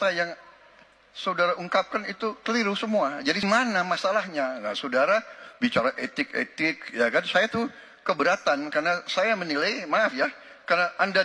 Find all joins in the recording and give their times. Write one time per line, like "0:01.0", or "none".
0:03.4